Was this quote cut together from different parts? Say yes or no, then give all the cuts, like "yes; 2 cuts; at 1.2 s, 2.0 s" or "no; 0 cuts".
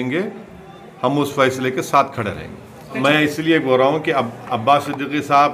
yes; 1 cut; at 3.0 s